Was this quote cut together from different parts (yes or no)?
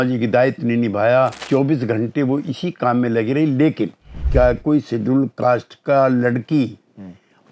yes